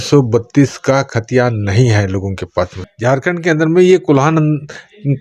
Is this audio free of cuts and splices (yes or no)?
no